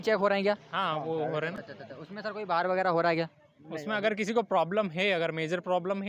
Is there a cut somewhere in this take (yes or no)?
no